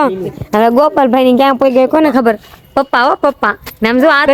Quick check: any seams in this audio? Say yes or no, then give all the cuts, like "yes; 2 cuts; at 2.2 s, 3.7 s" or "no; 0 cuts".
no; 0 cuts